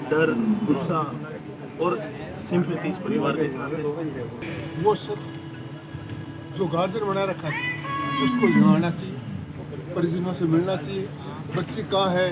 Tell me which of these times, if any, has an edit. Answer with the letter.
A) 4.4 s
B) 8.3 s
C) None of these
A